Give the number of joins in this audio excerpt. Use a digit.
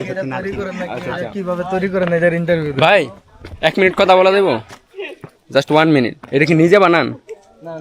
1